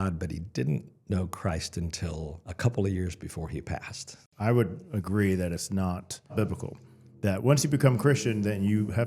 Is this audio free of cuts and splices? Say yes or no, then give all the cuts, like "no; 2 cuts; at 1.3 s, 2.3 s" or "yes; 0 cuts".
no; 3 cuts; at 2.4 s, 4.3 s, 6.3 s